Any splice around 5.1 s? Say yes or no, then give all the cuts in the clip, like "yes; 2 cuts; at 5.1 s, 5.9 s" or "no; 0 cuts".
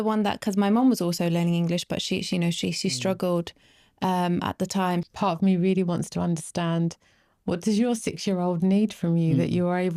yes; 1 cut; at 5.1 s